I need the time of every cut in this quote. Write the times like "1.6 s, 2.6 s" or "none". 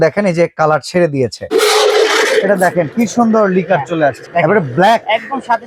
1.4 s, 4.2 s